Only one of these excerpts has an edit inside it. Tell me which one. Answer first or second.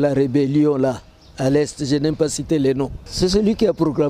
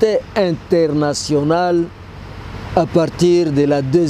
first